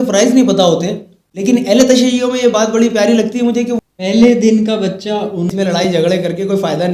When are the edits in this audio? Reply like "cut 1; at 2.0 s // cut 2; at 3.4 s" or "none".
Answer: cut 1; at 1.5 s // cut 2; at 3.8 s // cut 3; at 5.4 s